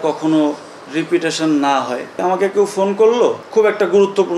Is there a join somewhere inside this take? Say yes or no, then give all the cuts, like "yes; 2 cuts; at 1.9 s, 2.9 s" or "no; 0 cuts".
yes; 2 cuts; at 2.1 s, 3.4 s